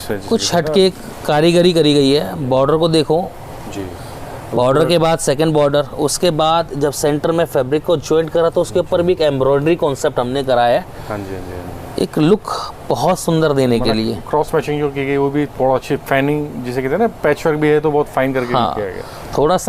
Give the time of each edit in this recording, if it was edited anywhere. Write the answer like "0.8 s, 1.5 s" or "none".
none